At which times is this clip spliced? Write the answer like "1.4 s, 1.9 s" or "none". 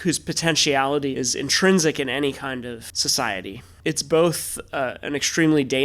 1.1 s, 2.9 s, 3.7 s